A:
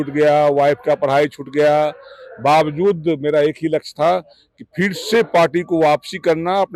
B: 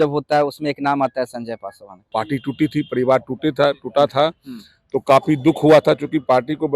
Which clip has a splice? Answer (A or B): B